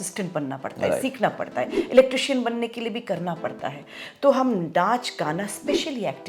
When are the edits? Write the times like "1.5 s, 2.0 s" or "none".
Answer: none